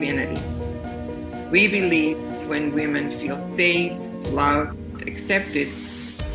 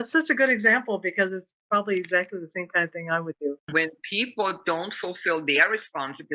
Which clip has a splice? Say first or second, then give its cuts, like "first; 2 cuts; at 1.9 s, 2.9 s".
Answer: second; 1 cut; at 3.6 s